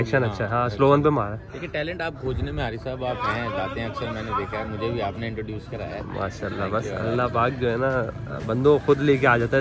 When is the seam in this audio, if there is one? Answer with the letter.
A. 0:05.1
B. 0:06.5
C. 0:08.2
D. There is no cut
D